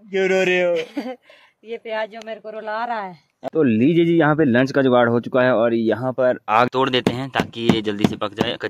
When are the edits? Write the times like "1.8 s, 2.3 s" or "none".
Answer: 3.5 s, 6.7 s